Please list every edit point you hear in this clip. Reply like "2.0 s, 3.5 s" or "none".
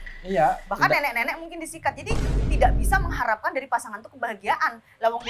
none

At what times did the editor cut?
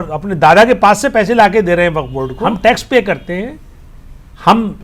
2.4 s

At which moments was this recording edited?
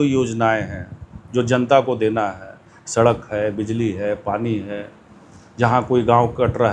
none

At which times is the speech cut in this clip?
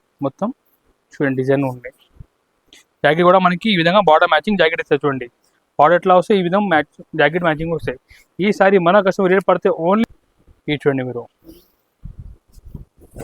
10.0 s

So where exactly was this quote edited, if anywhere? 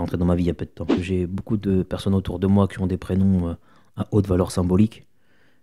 0.9 s

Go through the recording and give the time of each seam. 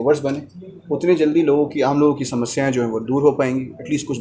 none

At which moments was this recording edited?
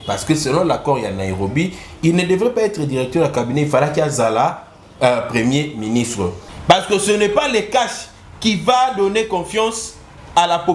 6.5 s

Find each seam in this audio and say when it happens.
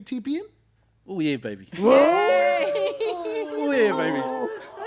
none

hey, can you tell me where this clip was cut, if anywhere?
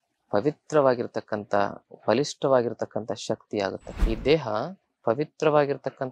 3.9 s

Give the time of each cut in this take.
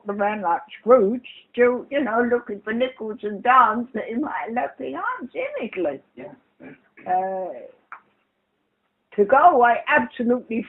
7.2 s

